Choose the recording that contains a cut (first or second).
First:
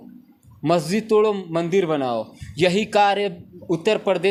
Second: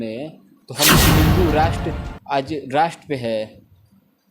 second